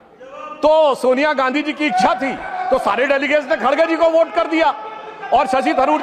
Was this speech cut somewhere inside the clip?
no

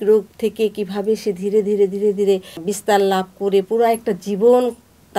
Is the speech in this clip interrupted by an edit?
yes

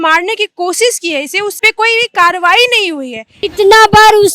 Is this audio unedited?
no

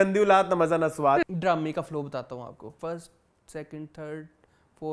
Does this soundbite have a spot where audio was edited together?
yes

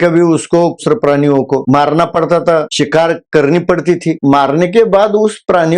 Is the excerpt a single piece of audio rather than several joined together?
no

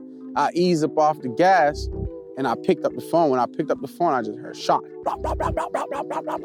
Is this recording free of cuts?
yes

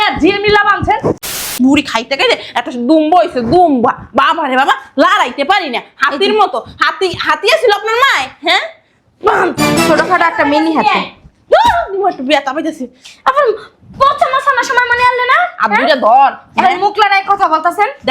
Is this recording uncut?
no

